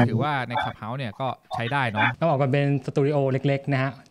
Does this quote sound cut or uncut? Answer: cut